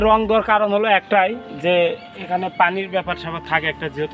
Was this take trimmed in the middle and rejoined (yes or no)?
no